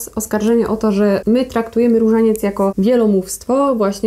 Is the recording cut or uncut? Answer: cut